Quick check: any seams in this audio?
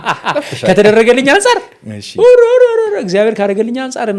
no; 0 cuts

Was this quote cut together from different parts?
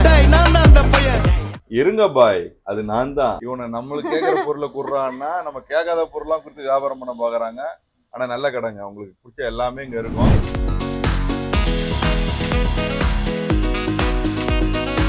no; 0 cuts

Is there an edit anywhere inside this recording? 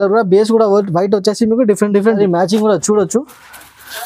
yes; 1 cut; at 2.2 s

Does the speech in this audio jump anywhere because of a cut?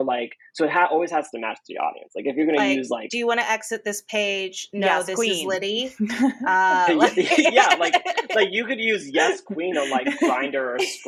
no; 0 cuts

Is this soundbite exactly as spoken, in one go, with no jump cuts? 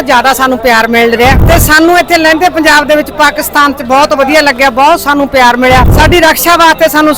no; 2 cuts; at 1.4 s, 5.9 s

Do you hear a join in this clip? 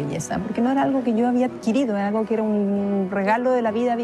no; 0 cuts

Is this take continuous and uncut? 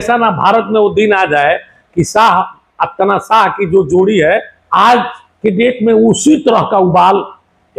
no; 1 cut; at 4.6 s

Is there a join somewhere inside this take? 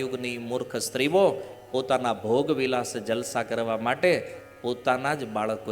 no; 0 cuts

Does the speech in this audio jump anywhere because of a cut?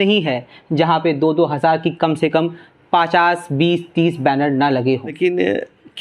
yes; 1 cut; at 5.1 s

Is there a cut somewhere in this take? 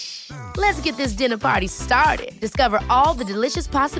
no; 0 cuts

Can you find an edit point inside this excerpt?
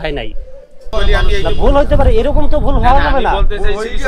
yes; 1 cut; at 0.9 s

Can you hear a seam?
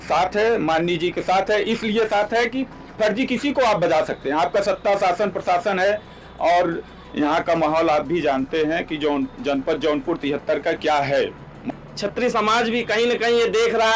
yes; 1 cut; at 11.6 s

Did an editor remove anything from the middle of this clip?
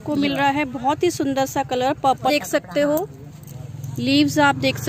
yes; 1 cut; at 2.2 s

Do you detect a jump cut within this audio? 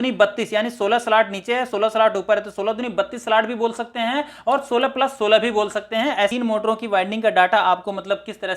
yes; 1 cut; at 6.3 s

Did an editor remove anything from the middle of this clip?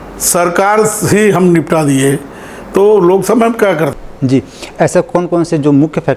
yes; 1 cut; at 4.0 s

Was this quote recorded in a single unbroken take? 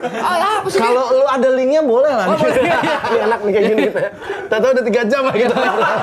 no; 1 cut; at 3.0 s

